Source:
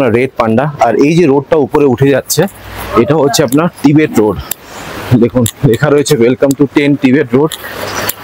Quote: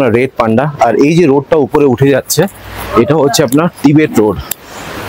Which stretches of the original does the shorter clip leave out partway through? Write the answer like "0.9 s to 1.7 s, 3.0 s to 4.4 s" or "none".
none